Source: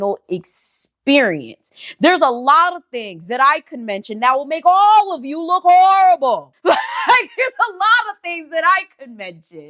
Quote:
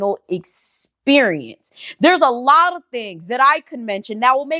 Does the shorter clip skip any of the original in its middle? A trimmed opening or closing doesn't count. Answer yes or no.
no